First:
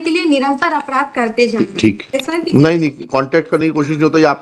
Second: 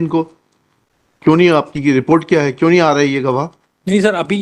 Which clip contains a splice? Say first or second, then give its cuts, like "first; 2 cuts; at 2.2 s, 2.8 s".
first; 1 cut; at 2.2 s